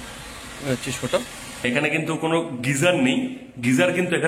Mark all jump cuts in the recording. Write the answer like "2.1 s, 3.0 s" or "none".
1.6 s